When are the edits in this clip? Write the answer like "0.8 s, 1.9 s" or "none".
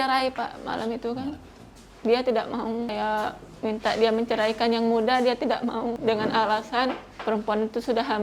2.9 s, 6.0 s, 7.1 s